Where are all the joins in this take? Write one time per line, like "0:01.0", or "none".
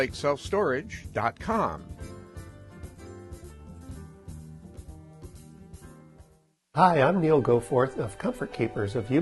0:06.8